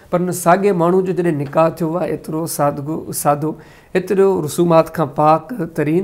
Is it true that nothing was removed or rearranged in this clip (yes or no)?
yes